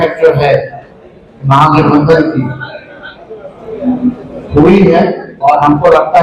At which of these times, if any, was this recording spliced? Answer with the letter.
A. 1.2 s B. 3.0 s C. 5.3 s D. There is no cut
C